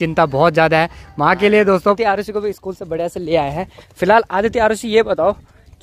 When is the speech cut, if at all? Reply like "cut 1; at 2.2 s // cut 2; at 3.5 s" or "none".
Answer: cut 1; at 2.0 s